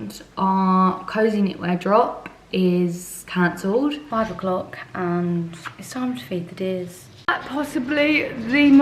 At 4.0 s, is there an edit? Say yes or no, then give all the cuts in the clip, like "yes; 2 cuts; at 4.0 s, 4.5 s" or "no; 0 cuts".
yes; 2 cuts; at 4.0 s, 7.3 s